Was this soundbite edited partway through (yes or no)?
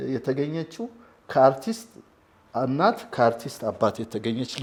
no